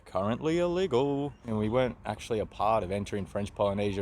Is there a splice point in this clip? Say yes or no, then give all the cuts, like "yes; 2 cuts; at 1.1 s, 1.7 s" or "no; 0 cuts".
yes; 1 cut; at 1.4 s